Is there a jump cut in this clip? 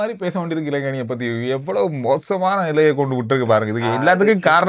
no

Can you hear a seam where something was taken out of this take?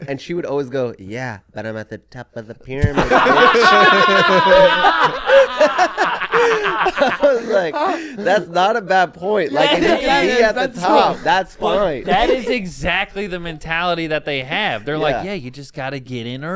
no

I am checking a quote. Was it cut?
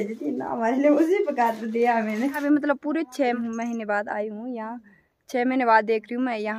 yes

